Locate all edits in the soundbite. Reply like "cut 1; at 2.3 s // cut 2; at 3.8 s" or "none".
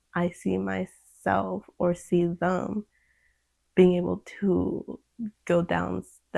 none